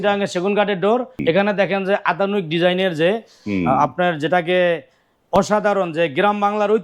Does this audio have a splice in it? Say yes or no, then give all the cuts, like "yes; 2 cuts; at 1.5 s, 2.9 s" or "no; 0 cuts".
yes; 1 cut; at 1.1 s